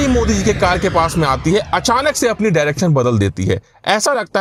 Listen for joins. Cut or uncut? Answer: uncut